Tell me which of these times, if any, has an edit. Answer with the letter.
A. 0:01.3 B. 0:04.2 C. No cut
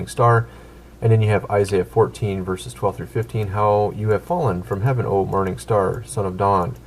B